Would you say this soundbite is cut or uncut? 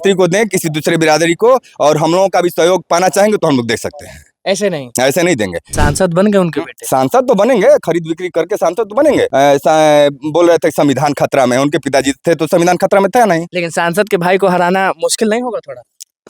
cut